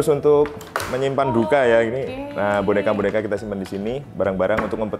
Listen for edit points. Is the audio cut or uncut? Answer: uncut